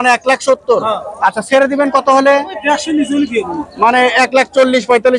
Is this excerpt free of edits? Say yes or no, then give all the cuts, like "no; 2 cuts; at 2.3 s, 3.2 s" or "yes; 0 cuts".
yes; 0 cuts